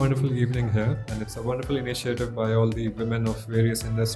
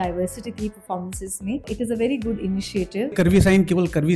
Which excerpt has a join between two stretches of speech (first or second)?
second